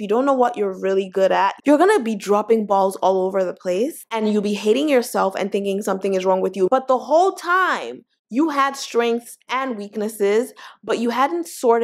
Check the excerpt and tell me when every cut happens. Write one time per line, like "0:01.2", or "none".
none